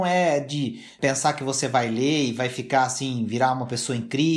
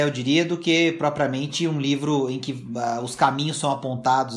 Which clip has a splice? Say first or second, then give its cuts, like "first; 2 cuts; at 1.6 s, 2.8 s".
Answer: first; 1 cut; at 0.9 s